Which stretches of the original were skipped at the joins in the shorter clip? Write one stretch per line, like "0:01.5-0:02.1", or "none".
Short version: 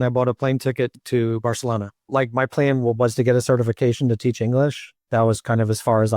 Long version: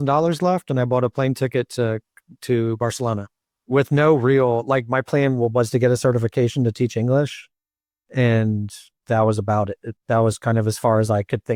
0:01.7-0:02.3
0:03.5-0:04.6
0:07.5-0:09.9